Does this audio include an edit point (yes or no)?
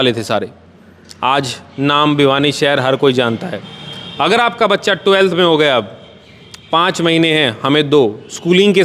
no